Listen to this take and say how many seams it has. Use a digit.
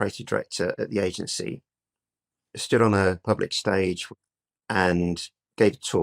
1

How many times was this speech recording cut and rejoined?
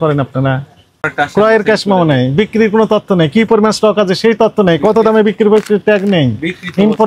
1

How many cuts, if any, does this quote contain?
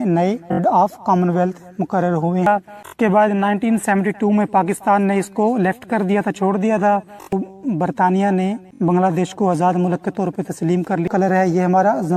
3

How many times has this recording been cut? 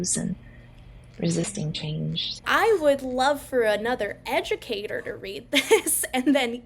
1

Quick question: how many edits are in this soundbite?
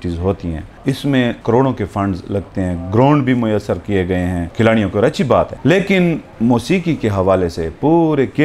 4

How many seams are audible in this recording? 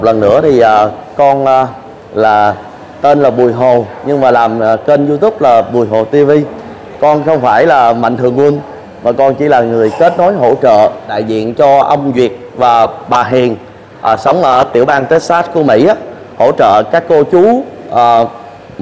1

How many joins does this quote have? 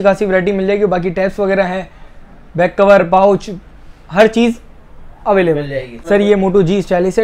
1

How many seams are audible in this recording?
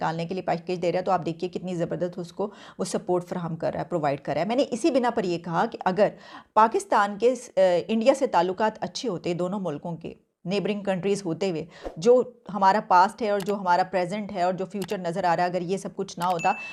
0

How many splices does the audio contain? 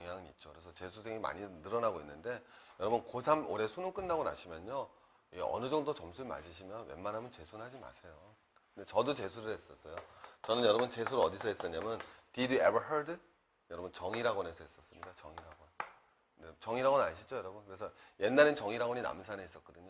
1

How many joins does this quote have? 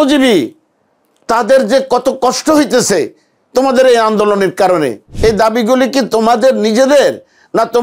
1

